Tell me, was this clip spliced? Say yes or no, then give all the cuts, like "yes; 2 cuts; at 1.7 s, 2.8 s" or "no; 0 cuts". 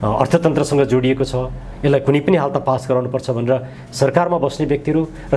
no; 0 cuts